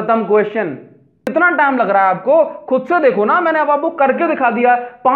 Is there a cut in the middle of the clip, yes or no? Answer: yes